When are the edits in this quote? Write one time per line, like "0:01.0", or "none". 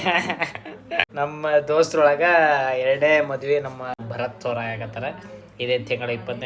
0:01.0
0:04.0